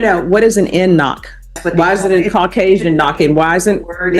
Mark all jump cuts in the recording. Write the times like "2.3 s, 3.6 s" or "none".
1.6 s